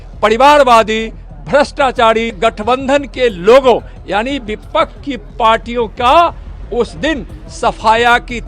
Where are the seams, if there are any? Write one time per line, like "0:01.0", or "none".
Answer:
0:02.4